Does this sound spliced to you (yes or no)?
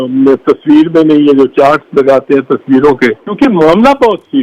yes